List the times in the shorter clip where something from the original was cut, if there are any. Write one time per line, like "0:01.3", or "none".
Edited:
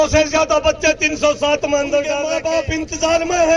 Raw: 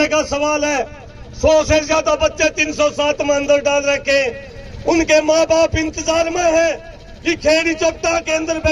0:02.3